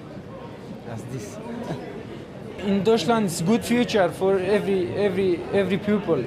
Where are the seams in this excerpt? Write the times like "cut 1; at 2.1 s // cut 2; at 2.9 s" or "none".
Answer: cut 1; at 3.3 s